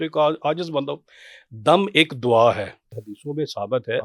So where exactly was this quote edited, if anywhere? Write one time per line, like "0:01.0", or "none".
0:03.1